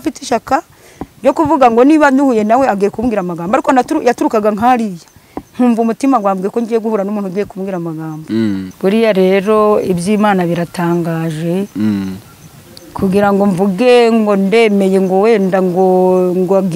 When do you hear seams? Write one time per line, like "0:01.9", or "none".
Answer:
0:08.7